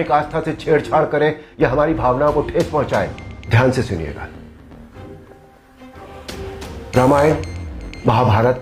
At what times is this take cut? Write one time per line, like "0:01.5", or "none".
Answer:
0:03.3
0:04.2
0:06.5

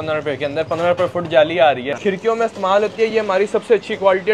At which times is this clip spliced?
0:01.9

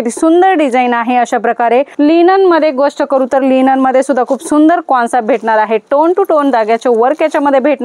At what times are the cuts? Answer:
0:01.9

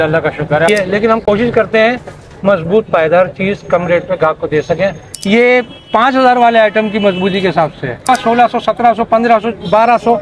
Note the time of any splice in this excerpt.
0:00.7
0:05.0
0:08.1

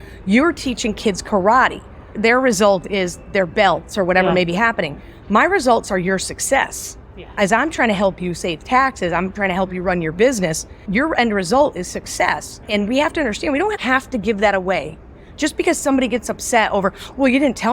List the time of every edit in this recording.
0:10.9
0:12.5

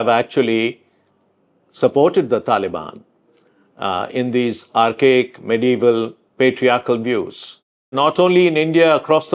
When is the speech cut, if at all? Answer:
0:07.9

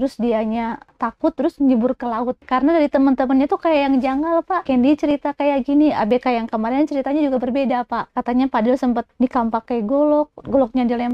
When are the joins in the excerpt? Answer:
0:00.9
0:02.4
0:04.6
0:08.0
0:09.1

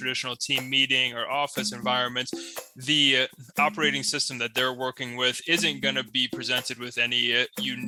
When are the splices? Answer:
none

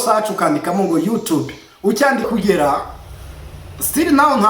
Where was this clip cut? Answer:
0:02.3

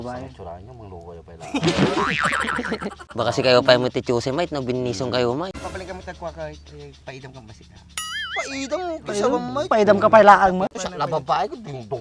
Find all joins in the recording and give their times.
0:03.0
0:05.5
0:10.8

